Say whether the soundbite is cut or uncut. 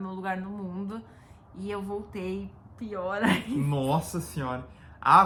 uncut